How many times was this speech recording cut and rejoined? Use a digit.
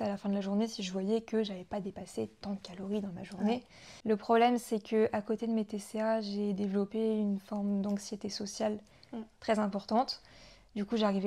0